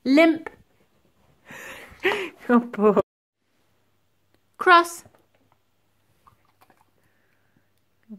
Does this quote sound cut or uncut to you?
cut